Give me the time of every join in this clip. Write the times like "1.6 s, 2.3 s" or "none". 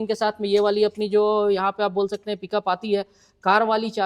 none